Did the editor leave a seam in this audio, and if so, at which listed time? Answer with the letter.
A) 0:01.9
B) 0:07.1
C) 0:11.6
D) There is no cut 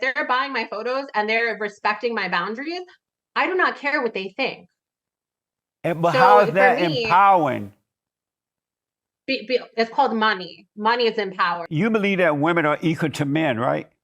C